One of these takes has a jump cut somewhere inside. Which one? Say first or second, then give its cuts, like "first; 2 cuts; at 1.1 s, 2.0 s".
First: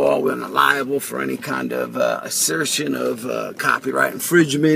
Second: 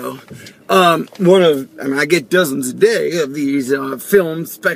first; 1 cut; at 3.8 s